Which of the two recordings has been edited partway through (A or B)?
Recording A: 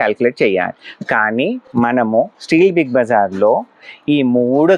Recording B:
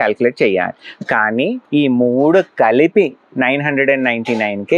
B